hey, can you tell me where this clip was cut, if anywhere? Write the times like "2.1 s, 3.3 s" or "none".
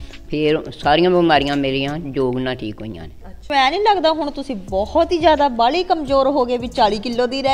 3.5 s